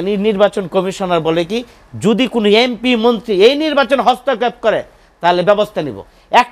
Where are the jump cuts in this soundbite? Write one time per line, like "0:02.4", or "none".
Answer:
none

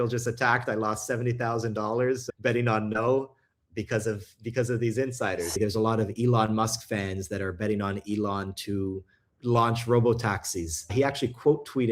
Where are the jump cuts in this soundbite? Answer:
0:02.3
0:05.6
0:09.3
0:10.9

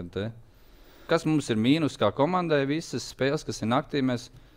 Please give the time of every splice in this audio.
0:01.1

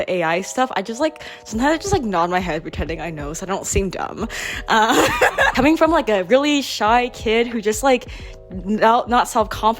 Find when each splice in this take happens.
0:05.5

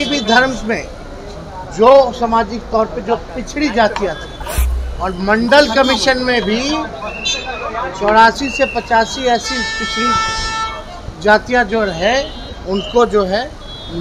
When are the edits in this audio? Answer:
none

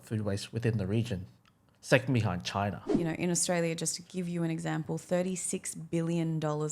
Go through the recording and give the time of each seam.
0:02.9

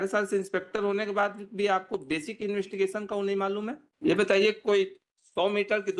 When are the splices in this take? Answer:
0:03.8

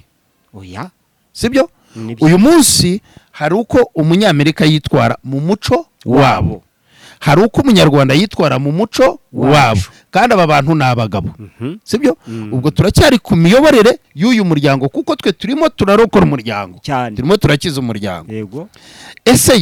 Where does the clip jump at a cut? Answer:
none

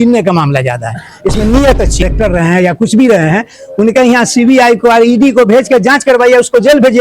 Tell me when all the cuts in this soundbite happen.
0:02.0

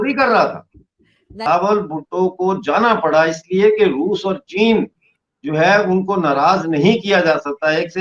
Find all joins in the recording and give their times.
0:01.5

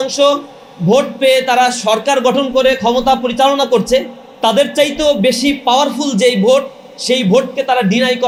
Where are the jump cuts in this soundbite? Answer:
none

